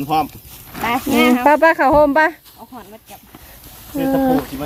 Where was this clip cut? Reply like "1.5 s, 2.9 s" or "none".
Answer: none